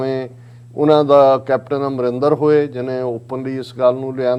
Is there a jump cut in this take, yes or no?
no